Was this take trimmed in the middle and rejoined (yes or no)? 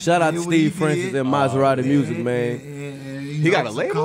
no